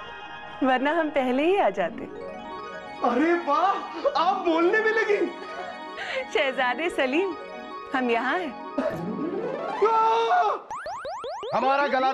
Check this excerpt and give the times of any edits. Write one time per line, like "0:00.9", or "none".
0:11.2